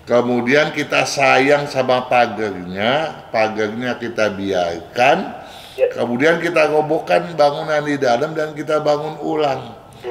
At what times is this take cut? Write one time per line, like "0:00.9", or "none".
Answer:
none